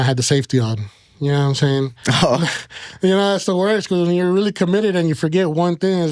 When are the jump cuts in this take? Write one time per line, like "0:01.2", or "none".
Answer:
none